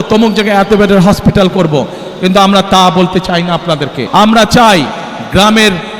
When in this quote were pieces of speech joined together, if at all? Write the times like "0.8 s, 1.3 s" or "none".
3.9 s

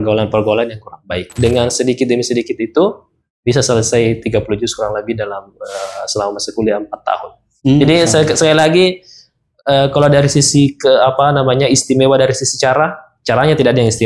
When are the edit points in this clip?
1.2 s

